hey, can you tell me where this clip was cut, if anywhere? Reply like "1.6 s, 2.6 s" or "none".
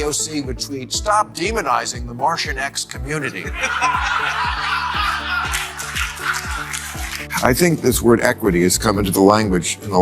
7.2 s

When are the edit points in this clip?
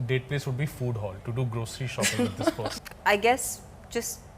2.7 s

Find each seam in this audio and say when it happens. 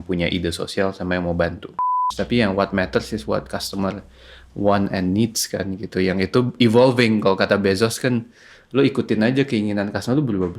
1.8 s

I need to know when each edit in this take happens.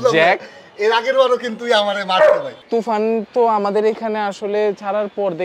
2.5 s

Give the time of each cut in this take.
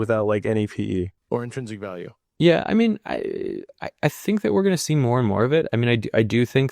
2.2 s

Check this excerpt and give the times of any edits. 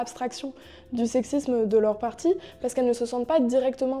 none

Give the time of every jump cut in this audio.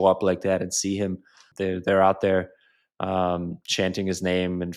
1.5 s

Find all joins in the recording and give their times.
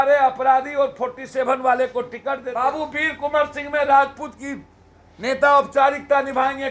2.5 s

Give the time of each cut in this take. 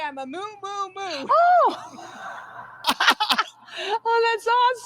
2.8 s

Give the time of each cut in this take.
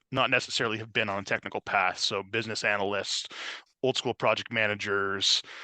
none

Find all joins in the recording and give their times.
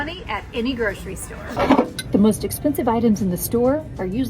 1.4 s

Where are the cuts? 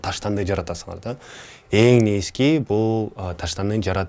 none

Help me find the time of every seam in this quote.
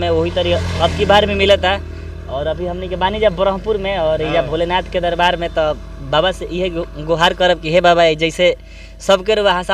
none

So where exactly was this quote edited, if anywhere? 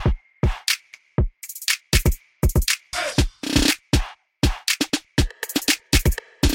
2.3 s

